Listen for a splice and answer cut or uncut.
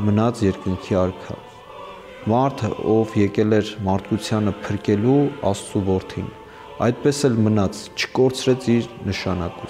uncut